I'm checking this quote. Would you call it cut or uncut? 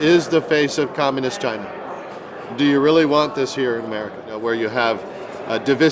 cut